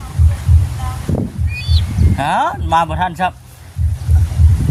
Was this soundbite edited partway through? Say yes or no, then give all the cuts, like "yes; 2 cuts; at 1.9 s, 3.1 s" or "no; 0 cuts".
no; 0 cuts